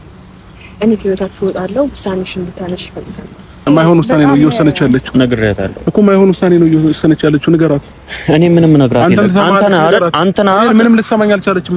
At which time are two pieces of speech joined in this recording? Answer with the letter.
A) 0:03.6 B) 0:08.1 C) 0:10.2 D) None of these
A